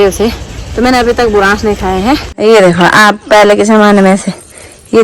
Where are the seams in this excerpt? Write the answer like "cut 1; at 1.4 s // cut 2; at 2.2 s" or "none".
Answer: cut 1; at 2.3 s